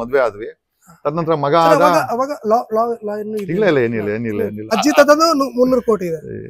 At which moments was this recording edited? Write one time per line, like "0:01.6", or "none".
0:04.6